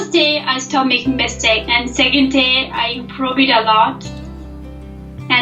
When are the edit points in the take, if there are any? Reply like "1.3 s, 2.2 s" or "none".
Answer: 1.7 s